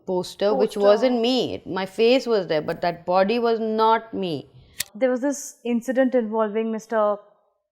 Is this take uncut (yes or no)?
no